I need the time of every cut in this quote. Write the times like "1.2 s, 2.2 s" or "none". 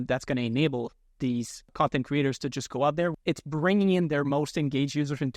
1.7 s, 3.1 s